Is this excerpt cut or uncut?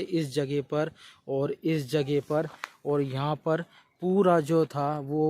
uncut